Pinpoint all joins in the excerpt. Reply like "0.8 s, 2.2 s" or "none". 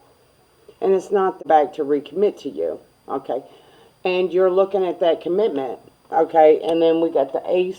1.4 s